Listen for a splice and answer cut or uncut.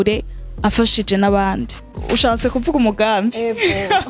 cut